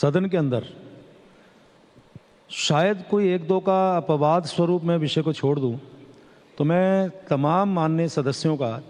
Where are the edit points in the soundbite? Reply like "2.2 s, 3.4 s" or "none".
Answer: none